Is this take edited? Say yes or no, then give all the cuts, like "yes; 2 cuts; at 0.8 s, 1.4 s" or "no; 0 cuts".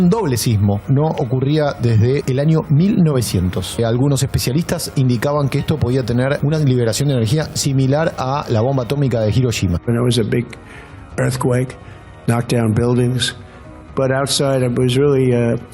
yes; 1 cut; at 9.8 s